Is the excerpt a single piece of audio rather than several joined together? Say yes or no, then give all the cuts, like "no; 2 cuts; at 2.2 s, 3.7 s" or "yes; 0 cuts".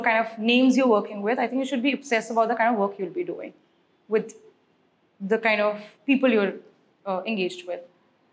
yes; 0 cuts